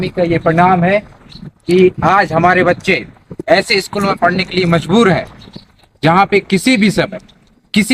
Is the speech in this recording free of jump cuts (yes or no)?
yes